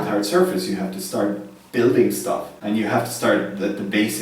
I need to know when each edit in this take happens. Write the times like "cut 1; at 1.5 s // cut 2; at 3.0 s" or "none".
cut 1; at 2.5 s